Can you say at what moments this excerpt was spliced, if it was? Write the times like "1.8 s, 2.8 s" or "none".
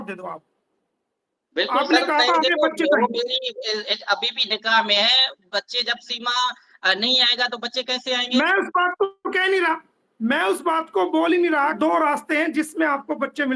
11.7 s